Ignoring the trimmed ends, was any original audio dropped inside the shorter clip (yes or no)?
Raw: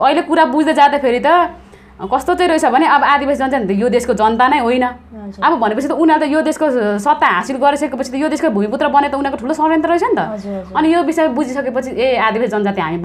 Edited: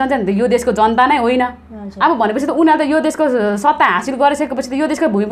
no